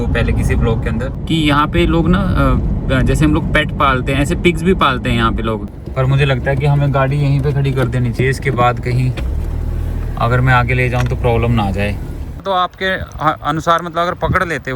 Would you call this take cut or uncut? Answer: cut